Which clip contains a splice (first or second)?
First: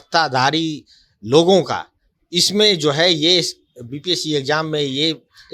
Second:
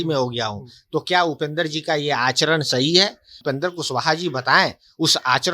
second